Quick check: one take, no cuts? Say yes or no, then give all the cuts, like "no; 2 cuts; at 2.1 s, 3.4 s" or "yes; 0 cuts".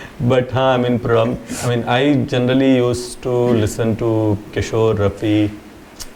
yes; 0 cuts